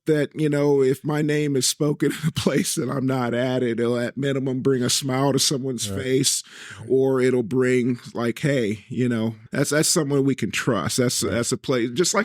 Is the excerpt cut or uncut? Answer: cut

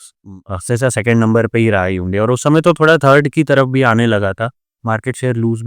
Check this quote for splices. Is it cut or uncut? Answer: uncut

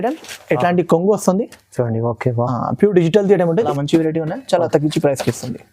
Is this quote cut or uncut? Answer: cut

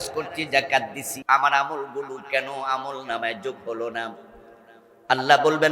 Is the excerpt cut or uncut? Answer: cut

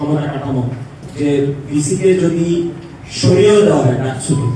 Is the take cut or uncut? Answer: cut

